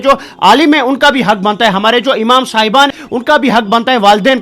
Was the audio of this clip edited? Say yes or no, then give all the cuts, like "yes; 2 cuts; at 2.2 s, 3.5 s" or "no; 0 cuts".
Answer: yes; 1 cut; at 3.0 s